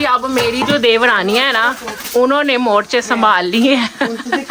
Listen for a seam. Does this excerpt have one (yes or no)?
no